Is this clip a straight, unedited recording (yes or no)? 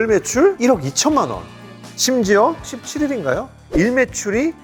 yes